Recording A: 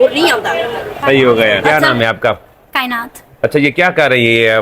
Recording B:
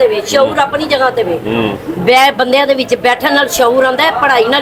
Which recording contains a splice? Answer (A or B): A